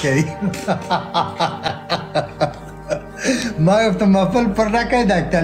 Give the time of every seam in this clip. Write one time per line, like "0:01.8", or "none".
none